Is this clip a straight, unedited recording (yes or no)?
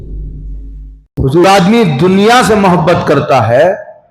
no